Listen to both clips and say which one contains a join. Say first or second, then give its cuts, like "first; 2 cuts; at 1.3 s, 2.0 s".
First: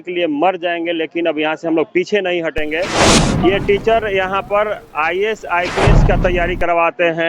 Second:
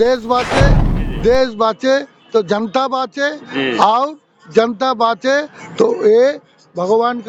first; 1 cut; at 3.2 s